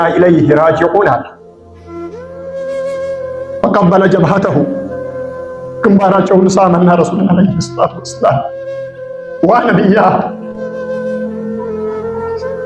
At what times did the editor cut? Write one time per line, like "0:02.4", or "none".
0:10.4